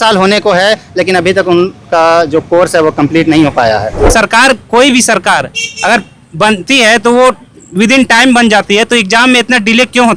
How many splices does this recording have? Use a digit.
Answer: 1